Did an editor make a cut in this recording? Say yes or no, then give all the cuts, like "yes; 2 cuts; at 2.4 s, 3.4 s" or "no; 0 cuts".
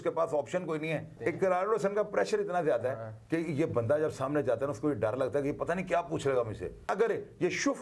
yes; 2 cuts; at 1.1 s, 6.9 s